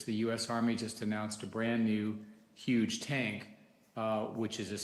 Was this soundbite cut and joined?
no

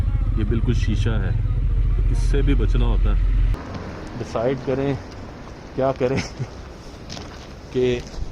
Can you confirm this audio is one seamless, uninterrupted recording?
no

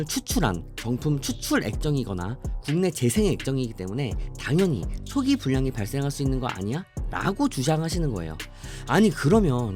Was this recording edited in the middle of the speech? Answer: no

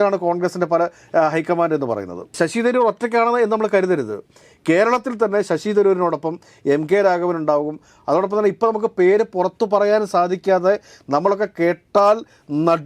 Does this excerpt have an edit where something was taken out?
no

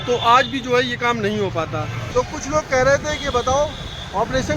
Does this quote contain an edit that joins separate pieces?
yes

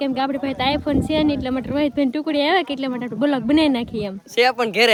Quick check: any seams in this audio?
no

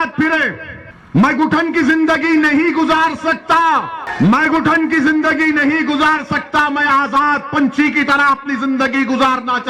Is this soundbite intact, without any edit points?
yes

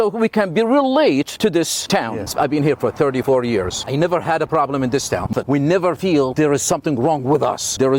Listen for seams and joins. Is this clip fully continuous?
no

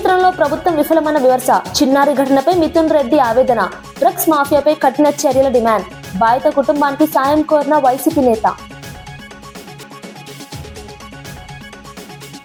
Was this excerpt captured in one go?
yes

